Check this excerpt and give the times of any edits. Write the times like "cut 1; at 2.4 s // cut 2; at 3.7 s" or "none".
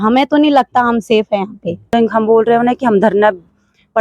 cut 1; at 1.9 s